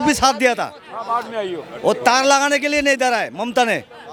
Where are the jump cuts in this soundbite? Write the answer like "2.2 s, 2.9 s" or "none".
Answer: none